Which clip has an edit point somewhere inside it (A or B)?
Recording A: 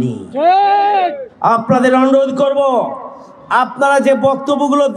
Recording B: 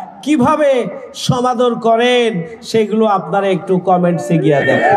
A